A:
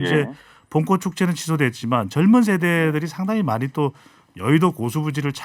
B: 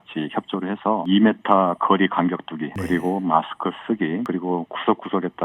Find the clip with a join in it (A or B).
B